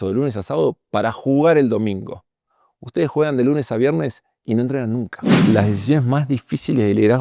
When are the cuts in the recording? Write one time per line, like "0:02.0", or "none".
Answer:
0:05.4

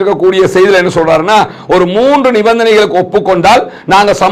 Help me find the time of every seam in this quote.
none

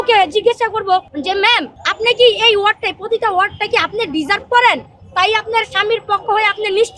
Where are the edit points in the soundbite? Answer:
0:01.1
0:01.8

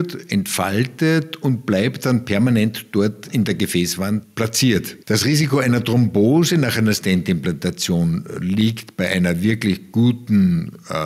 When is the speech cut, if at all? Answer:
0:03.2
0:04.3
0:04.9

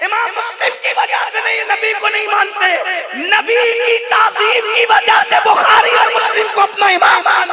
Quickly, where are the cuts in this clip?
none

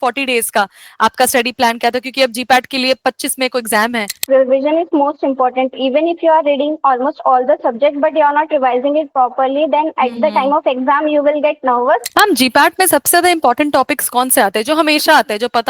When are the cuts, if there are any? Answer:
0:04.2
0:12.1

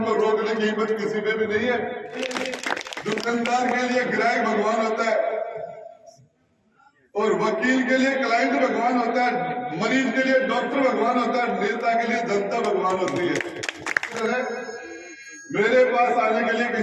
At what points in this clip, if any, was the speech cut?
0:02.2
0:14.2

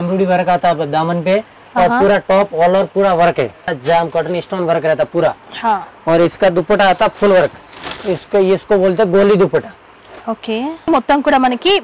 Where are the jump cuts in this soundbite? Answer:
0:03.8
0:10.9

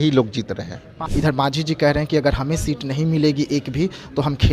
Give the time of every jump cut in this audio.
0:01.0

